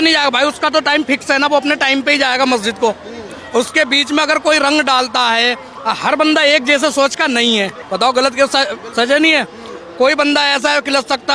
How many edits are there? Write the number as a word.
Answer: zero